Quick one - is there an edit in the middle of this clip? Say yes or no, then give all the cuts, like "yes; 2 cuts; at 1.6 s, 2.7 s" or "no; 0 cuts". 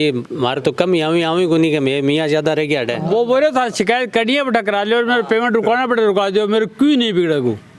yes; 1 cut; at 3.0 s